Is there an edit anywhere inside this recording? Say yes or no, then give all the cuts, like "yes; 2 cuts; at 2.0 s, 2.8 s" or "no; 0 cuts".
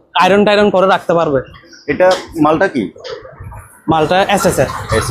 no; 0 cuts